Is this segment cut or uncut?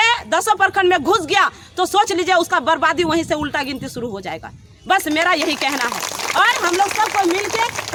uncut